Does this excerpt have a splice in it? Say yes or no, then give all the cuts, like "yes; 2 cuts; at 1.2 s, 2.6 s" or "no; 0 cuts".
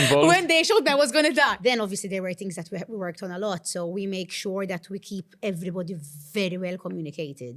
yes; 1 cut; at 1.6 s